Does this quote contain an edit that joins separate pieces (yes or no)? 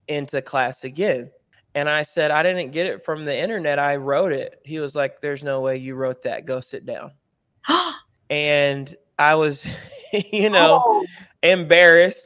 yes